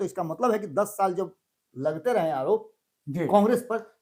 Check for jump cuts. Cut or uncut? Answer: uncut